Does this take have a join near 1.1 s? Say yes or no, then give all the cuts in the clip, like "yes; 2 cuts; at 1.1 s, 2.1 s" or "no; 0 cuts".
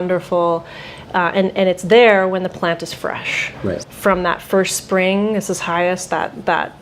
no; 1 cut; at 3.8 s